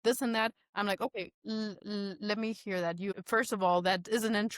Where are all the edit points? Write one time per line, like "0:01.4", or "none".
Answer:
0:03.1